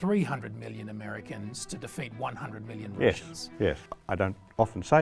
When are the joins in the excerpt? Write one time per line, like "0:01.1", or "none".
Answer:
0:03.9

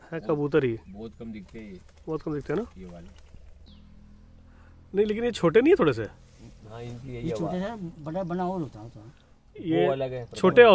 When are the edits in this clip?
0:03.7

